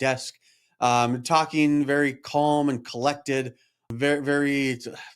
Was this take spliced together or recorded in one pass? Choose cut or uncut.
cut